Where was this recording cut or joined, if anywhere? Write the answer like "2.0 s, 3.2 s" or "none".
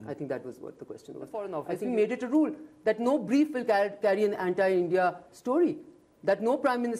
1.5 s